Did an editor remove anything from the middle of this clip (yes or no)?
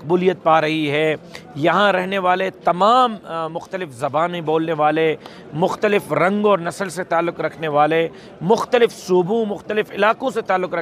no